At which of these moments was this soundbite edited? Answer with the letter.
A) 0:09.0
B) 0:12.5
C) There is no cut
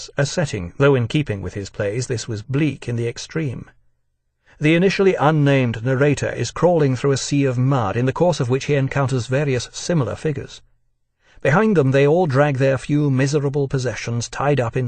C